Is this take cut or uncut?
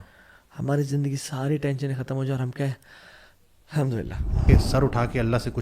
cut